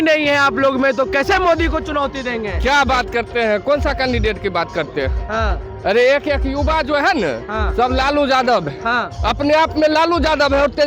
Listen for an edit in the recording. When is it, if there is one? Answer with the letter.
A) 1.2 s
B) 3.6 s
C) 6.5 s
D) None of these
D